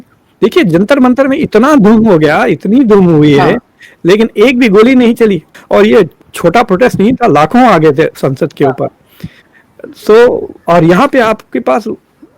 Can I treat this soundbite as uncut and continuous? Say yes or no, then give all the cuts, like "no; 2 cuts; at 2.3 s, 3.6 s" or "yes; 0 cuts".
no; 1 cut; at 5.5 s